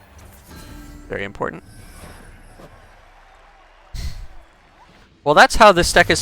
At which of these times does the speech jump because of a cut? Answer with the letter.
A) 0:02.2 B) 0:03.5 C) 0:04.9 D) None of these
C